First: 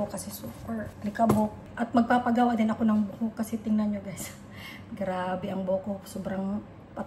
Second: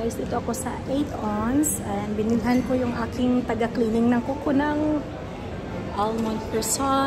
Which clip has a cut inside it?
first; 2 cuts; at 0.9 s, 1.7 s

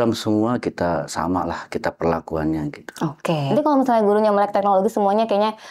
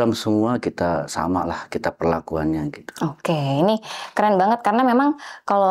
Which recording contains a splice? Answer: first; 1 cut; at 3.4 s

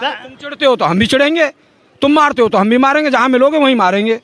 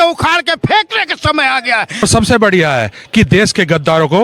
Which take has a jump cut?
second; 1 cut; at 2.0 s

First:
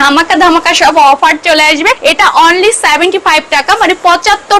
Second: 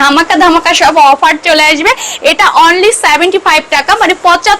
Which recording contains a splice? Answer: first; 1 cut; at 2.0 s

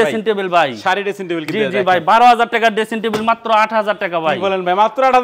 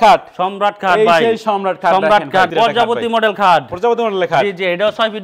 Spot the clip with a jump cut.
second; 1 cut; at 2.5 s

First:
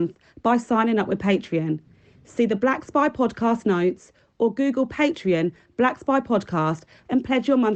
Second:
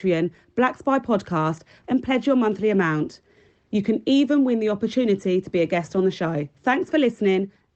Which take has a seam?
second; 1 cut; at 6.5 s

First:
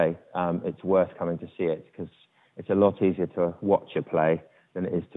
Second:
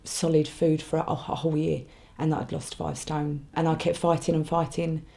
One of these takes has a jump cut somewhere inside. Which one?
second; 1 cut; at 3.5 s

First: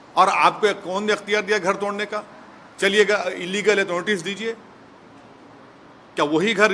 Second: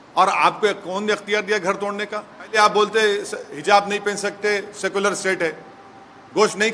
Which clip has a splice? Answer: second; 1 cut; at 2.6 s

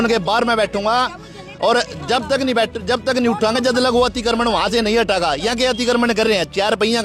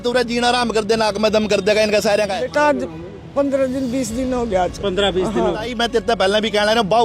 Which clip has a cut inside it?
second; 2 cuts; at 2.4 s, 5.7 s

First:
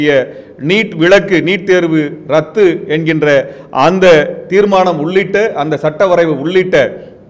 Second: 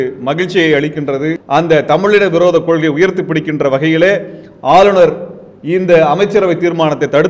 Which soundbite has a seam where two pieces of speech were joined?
second; 1 cut; at 1.4 s

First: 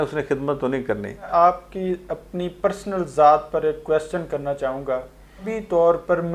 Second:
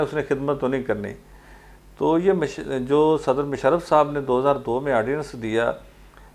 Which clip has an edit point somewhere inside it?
first; 2 cuts; at 1.3 s, 5.5 s

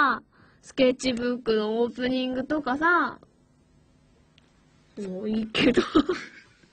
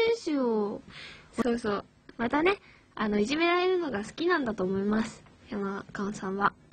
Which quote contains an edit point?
second; 1 cut; at 1.4 s

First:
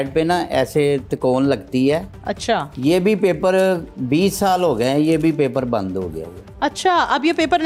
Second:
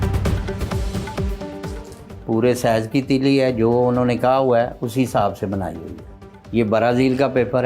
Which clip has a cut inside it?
second; 2 cuts; at 1.6 s, 5.9 s

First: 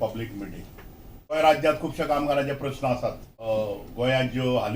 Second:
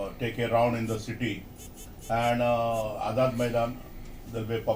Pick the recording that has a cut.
first; 2 cuts; at 1.3 s, 3.3 s

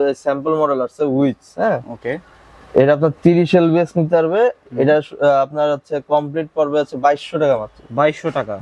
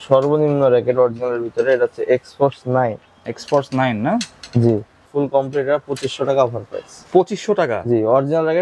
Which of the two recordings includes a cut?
second; 1 cut; at 5.1 s

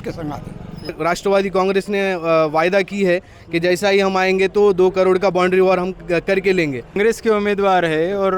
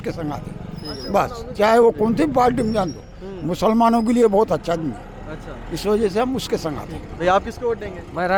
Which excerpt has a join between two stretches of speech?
first; 2 cuts; at 1.0 s, 7.0 s

